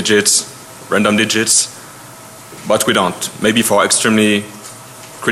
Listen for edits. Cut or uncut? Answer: uncut